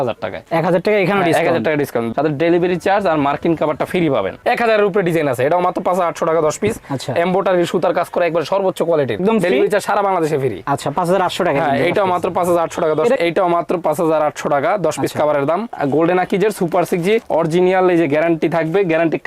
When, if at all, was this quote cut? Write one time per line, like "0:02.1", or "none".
0:02.1
0:04.4
0:09.2
0:13.2
0:15.7

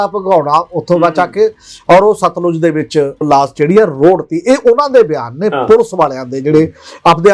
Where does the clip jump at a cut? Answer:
0:03.3

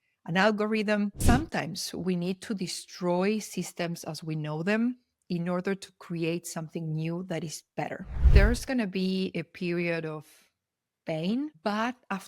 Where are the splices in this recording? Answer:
0:01.2
0:08.3

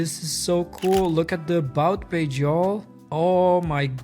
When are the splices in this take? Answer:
0:03.0

